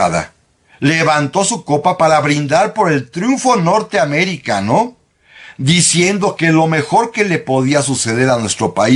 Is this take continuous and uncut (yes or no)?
yes